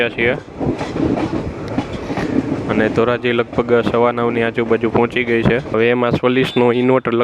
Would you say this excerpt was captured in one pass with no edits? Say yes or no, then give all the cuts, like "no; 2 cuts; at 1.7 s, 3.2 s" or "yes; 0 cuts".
no; 1 cut; at 5.7 s